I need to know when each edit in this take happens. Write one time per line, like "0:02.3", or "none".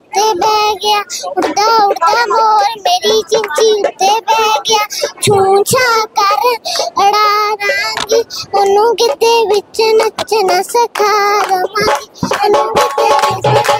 none